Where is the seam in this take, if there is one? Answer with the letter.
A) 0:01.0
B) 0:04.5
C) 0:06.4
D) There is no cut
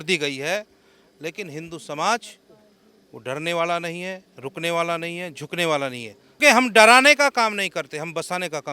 C